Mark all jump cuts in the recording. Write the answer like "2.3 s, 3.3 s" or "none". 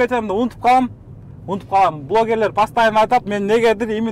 none